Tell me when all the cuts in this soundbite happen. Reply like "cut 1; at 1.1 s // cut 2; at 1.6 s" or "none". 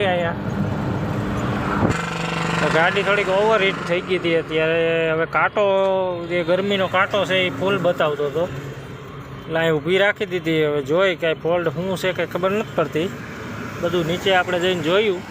cut 1; at 1.9 s